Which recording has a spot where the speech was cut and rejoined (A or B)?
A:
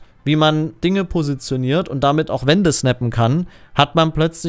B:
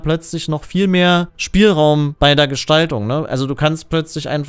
B